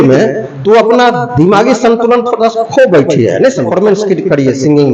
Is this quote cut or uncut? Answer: cut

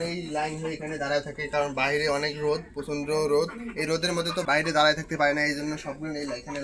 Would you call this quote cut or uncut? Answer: cut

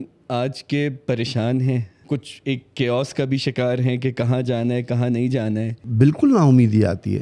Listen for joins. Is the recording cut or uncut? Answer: cut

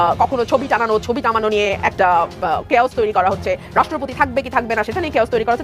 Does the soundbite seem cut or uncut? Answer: uncut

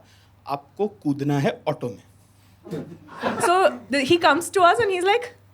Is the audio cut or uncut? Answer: cut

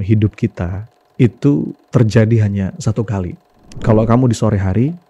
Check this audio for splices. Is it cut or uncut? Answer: cut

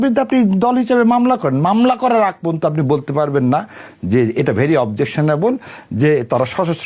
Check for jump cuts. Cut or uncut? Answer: uncut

